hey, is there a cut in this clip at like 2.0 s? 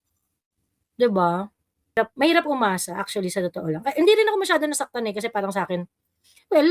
yes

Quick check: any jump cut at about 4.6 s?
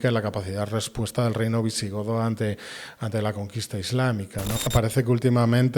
yes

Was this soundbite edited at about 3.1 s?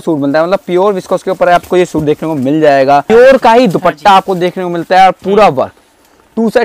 yes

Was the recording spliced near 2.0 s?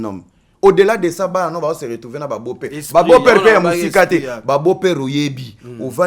no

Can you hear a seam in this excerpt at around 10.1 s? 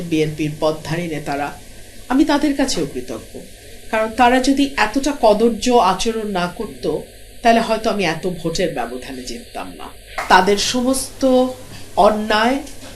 yes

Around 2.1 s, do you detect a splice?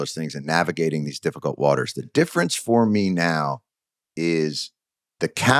yes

